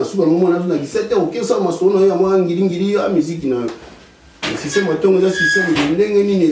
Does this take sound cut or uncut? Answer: uncut